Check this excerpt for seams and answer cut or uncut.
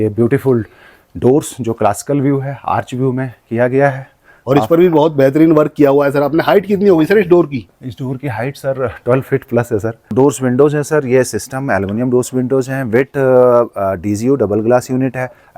cut